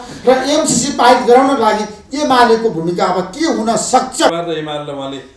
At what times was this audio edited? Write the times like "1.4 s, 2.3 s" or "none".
4.3 s

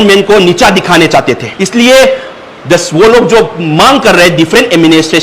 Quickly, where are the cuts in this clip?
1.5 s

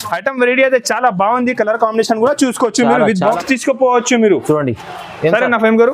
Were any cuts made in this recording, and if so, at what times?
3.4 s

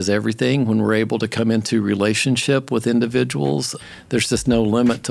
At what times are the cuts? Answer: 3.8 s

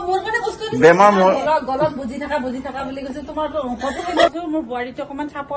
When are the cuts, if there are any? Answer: 4.3 s

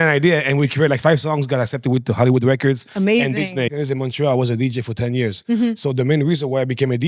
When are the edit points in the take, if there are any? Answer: 3.7 s

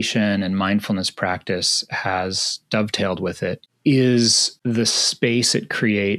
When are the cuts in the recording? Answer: 3.7 s, 4.5 s

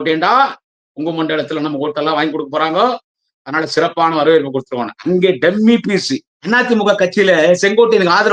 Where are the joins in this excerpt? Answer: 6.3 s

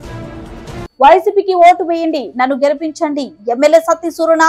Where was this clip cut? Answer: 0.9 s

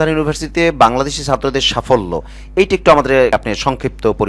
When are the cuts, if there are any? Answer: 3.3 s

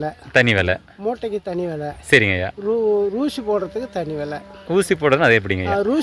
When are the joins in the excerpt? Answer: none

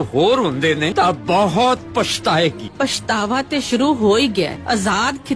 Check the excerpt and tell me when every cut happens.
0.9 s, 2.6 s, 4.6 s

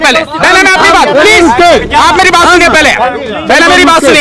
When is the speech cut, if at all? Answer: none

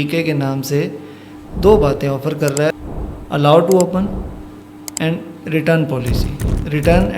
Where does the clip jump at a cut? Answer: 2.7 s

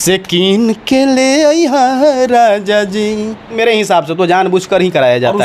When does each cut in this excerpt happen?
3.5 s

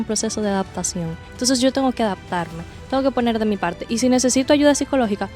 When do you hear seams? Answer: 1.2 s

